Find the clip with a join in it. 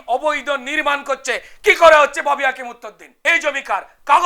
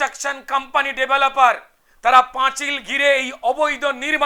first; 1 cut; at 3.0 s

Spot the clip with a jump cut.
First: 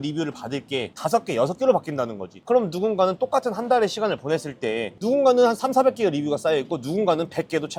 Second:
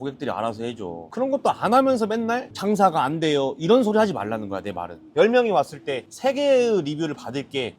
second; 1 cut; at 5.1 s

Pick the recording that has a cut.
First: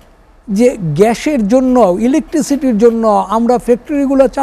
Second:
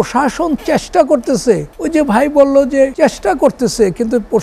second; 2 cuts; at 1.7 s, 2.9 s

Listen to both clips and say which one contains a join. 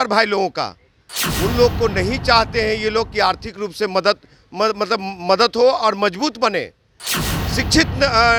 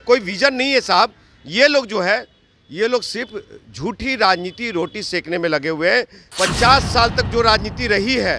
second; 1 cut; at 6.2 s

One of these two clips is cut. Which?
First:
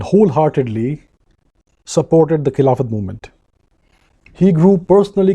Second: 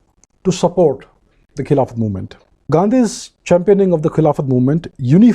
second; 1 cut; at 2.7 s

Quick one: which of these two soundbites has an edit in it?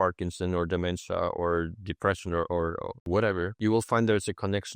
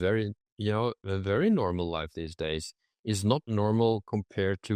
first; 2 cuts; at 2.9 s, 3.5 s

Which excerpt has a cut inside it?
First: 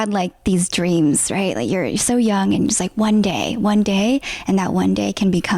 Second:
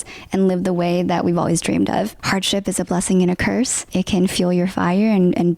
second; 2 cuts; at 2.2 s, 3.8 s

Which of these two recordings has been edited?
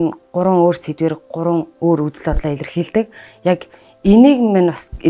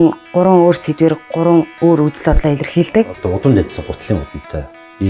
second; 1 cut; at 3.1 s

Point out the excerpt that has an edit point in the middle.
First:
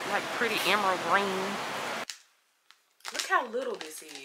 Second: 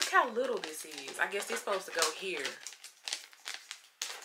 first; 1 cut; at 2.0 s

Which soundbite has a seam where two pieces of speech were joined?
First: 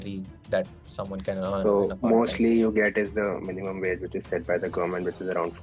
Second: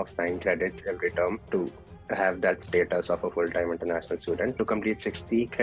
second; 2 cuts; at 1.4 s, 4.6 s

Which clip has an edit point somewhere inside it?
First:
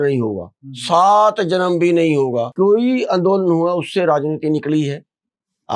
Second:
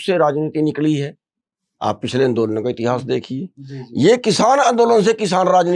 first; 1 cut; at 2.5 s

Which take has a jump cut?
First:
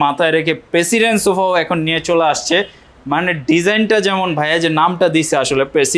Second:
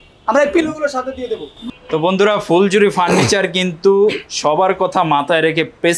second; 1 cut; at 1.5 s

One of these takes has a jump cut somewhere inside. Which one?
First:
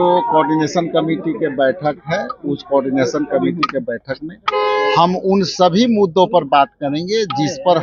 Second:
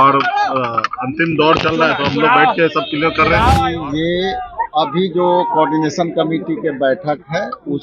second; 1 cut; at 3.7 s

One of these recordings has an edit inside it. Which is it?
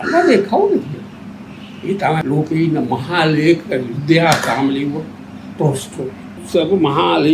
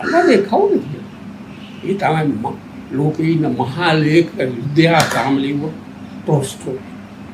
first; 2 cuts; at 2.2 s, 6.4 s

